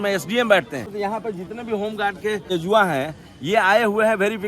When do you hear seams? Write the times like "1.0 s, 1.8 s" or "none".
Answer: 0.8 s, 2.5 s